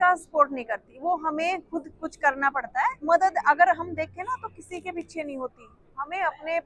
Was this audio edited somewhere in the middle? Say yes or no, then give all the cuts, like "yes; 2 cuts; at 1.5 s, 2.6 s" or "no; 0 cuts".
yes; 1 cut; at 3.0 s